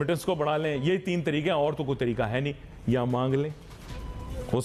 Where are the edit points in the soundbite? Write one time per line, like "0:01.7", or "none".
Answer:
none